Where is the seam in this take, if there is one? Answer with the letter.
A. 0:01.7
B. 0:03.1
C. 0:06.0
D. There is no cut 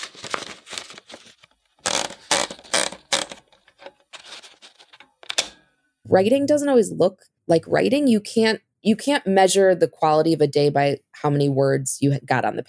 C